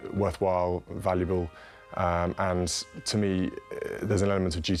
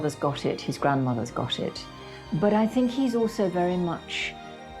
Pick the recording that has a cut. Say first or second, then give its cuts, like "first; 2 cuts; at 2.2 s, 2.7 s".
second; 1 cut; at 1.9 s